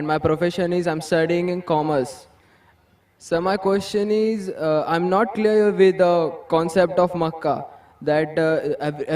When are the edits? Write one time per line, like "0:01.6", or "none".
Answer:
none